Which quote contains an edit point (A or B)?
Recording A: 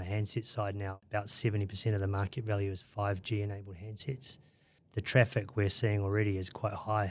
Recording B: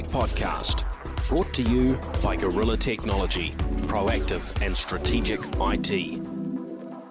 A